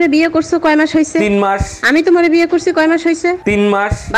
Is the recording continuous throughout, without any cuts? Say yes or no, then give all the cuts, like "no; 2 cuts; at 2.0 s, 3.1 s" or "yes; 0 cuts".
yes; 0 cuts